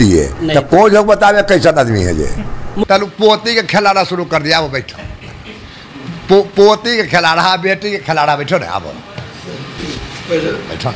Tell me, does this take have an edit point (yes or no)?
yes